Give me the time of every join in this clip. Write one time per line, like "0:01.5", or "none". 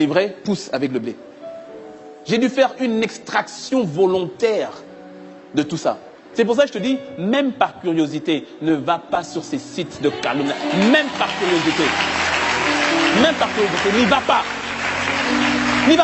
none